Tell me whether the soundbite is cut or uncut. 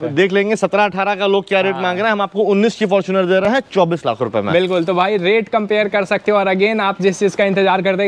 uncut